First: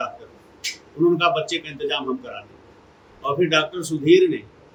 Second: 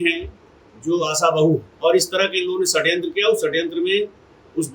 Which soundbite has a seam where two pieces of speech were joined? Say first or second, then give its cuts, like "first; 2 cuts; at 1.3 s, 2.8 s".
second; 1 cut; at 1.7 s